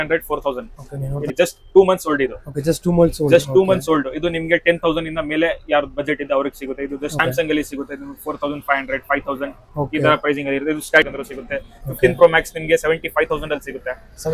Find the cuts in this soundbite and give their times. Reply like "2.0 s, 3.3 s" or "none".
1.2 s, 7.1 s, 11.1 s